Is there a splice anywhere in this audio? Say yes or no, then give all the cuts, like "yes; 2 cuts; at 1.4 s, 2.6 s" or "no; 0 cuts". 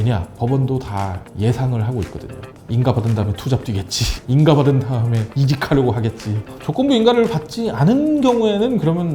yes; 2 cuts; at 5.2 s, 6.3 s